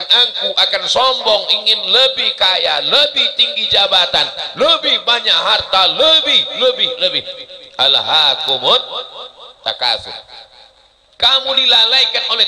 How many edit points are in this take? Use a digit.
0